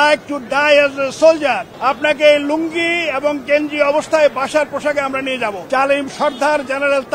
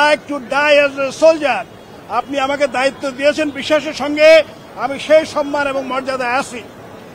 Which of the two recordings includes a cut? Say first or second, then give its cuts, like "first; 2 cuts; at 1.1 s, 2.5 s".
first; 2 cuts; at 1.7 s, 5.6 s